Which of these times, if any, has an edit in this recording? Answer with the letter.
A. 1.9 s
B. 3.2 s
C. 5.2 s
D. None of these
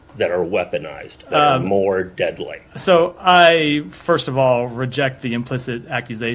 B